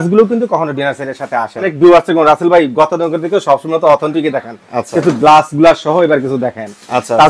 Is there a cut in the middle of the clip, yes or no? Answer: yes